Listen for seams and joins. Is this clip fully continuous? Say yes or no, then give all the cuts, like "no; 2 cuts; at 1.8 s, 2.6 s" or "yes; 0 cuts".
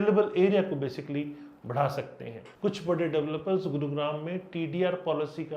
no; 1 cut; at 2.4 s